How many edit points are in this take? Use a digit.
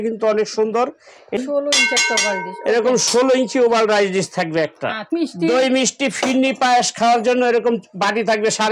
2